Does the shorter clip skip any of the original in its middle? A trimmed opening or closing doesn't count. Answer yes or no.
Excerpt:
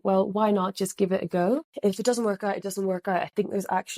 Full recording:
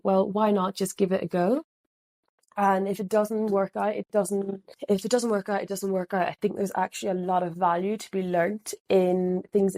yes